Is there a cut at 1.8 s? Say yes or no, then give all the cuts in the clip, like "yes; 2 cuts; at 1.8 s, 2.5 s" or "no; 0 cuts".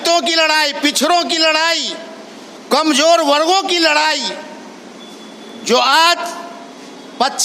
no; 0 cuts